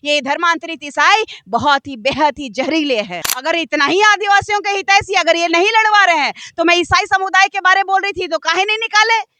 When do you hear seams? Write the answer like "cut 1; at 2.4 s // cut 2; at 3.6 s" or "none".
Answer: cut 1; at 3.3 s